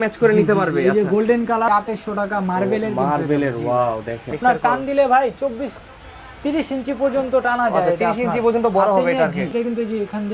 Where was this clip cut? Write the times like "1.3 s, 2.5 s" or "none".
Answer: 1.7 s, 4.4 s, 9.5 s